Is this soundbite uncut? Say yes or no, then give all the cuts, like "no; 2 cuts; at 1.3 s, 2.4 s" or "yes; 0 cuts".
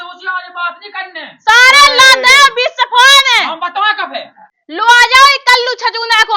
no; 1 cut; at 4.2 s